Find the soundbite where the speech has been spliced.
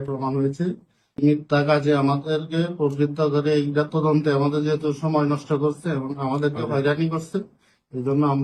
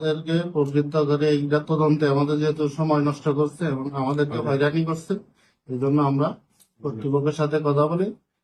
first; 1 cut; at 1.2 s

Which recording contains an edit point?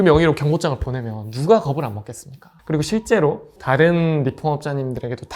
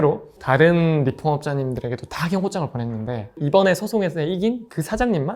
second; 1 cut; at 3.3 s

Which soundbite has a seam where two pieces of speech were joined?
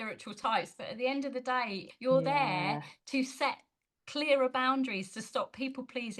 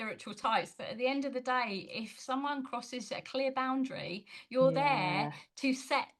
first; 1 cut; at 1.9 s

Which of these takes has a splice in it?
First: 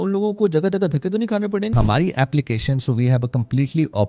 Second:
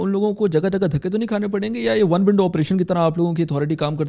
first; 1 cut; at 1.7 s

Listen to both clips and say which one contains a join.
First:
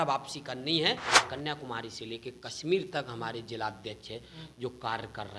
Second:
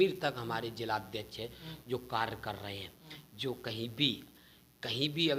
first; 1 cut; at 1.2 s

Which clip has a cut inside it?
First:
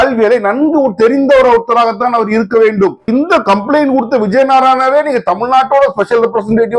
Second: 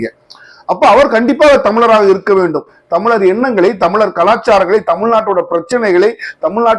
first; 1 cut; at 3.1 s

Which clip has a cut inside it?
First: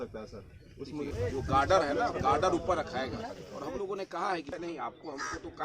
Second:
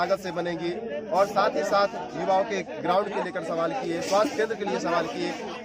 first; 2 cuts; at 1.1 s, 4.5 s

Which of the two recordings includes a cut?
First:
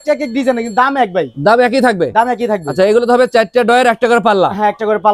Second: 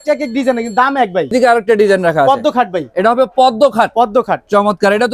second; 1 cut; at 1.3 s

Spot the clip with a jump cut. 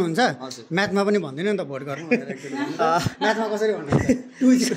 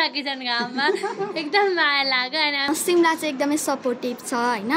second; 1 cut; at 2.7 s

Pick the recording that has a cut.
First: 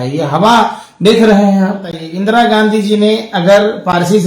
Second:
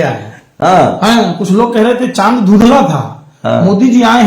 first; 1 cut; at 2.1 s

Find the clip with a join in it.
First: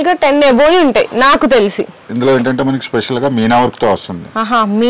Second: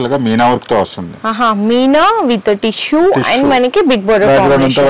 first; 1 cut; at 2.0 s

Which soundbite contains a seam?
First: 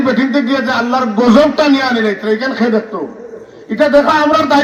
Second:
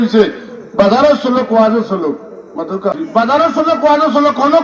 second; 1 cut; at 3.0 s

